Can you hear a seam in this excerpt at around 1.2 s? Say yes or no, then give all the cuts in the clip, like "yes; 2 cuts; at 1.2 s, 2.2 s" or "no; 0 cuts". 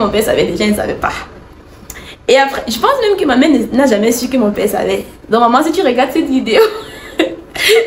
no; 0 cuts